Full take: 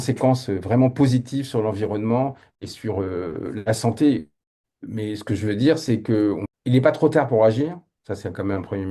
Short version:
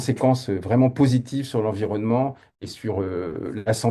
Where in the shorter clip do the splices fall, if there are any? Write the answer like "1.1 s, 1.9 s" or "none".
none